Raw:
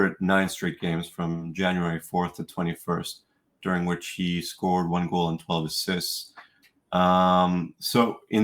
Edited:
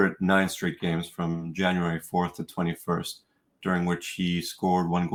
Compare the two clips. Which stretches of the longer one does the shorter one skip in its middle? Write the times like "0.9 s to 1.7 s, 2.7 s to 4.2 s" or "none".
none